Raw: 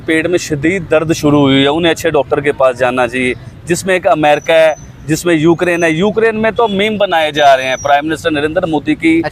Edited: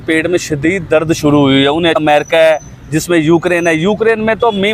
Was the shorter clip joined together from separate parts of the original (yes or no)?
yes